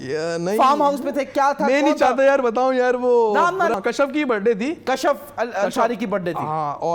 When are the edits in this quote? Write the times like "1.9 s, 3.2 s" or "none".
3.7 s